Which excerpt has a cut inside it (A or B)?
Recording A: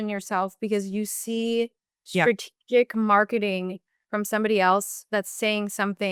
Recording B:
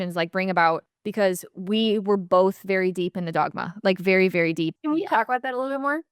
B